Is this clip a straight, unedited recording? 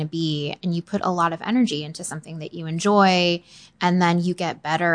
yes; 0 cuts

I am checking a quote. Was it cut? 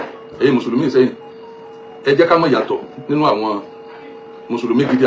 no; 0 cuts

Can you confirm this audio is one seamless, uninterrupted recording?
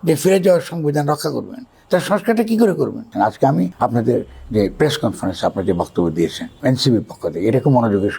no; 2 cuts; at 3.0 s, 3.7 s

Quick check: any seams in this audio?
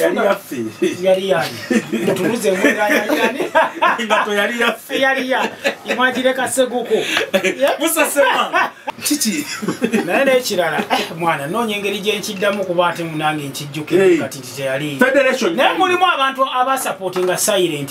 yes; 1 cut; at 8.8 s

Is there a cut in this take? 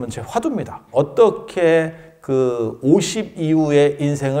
no; 0 cuts

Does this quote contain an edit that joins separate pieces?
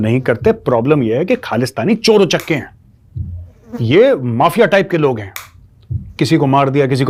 no; 0 cuts

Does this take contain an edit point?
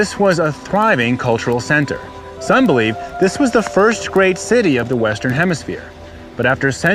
yes; 1 cut; at 3.6 s

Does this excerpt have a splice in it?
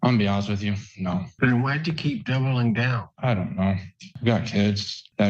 yes; 2 cuts; at 3.0 s, 4.1 s

